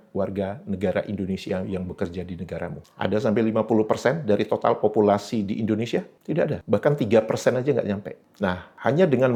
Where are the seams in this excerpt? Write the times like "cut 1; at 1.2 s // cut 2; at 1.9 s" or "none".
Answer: none